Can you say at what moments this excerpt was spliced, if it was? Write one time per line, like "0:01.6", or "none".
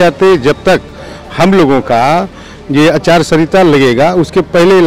none